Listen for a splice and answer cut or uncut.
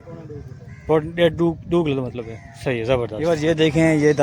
cut